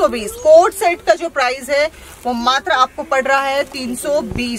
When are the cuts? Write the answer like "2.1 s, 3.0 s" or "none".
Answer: none